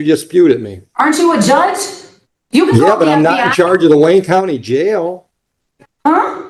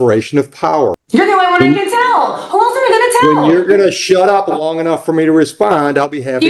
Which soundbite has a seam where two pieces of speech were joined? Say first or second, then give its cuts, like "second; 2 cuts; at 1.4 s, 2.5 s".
second; 1 cut; at 1.0 s